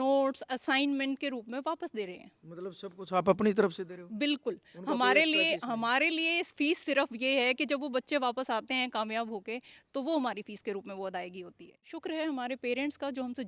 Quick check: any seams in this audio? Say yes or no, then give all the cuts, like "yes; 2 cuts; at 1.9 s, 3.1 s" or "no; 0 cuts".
yes; 1 cut; at 11.9 s